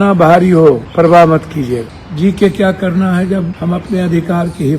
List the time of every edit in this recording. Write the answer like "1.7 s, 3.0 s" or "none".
0.9 s, 2.0 s, 3.5 s